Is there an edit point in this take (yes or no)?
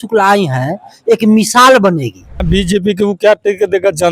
yes